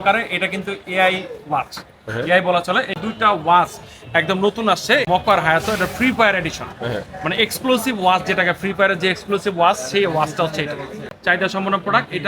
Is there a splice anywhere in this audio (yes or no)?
yes